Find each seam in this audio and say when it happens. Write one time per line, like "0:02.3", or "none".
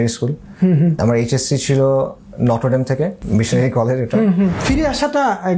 0:01.0
0:03.2
0:04.6

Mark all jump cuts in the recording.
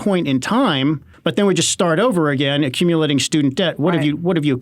0:01.1

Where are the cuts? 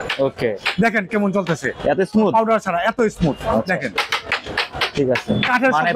none

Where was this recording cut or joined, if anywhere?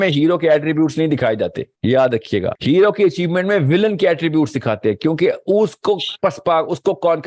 0:01.7
0:02.6
0:06.1

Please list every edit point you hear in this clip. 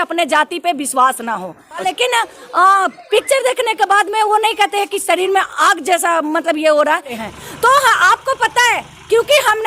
0:01.9
0:07.2

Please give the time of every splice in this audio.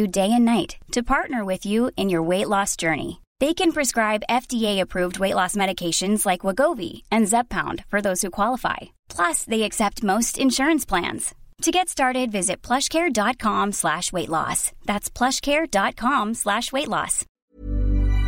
0:17.3

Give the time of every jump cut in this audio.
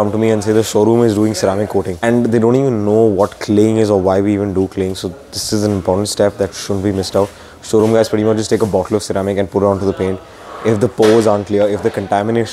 0:02.0

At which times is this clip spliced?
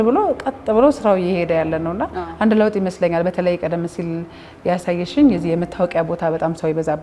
none

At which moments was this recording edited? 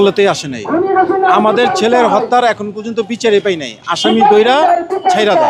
none

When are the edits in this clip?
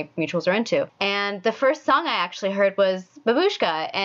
0:00.9

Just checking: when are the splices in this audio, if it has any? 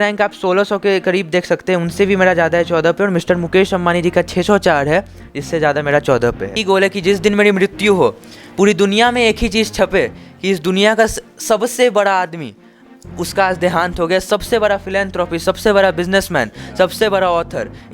0:06.6

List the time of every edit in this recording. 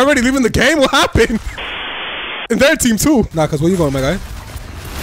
0:03.3

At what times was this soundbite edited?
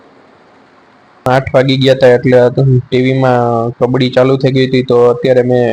0:01.3

